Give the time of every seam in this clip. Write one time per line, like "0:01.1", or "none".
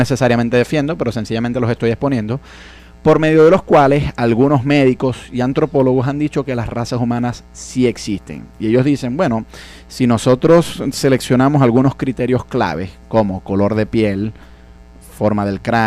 none